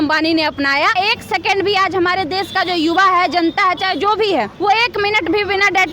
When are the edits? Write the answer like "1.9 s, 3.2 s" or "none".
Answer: 0.9 s, 4.5 s